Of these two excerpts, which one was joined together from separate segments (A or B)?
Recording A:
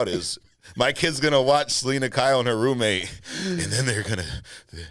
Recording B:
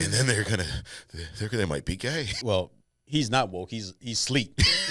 B